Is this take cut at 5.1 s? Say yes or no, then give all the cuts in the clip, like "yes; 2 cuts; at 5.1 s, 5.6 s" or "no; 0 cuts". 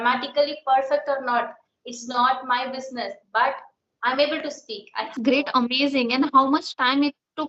yes; 1 cut; at 5.1 s